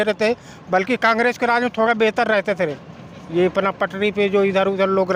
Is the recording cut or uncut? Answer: uncut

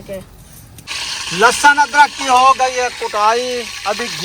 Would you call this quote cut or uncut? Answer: cut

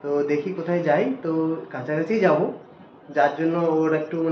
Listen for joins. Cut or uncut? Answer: uncut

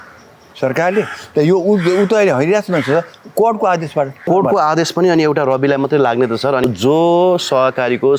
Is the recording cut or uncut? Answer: cut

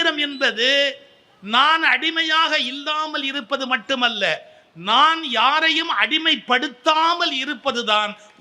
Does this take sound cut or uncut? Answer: uncut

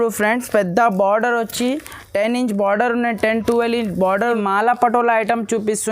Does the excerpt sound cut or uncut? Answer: cut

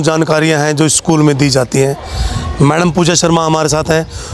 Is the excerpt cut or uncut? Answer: uncut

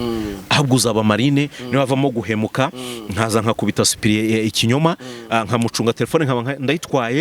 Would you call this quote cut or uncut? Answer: uncut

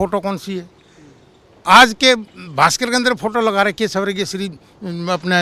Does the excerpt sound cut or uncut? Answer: uncut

